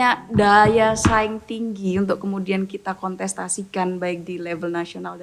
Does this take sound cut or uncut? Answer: uncut